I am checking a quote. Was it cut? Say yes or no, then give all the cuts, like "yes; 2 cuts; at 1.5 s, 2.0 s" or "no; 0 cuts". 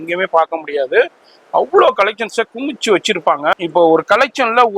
yes; 1 cut; at 3.5 s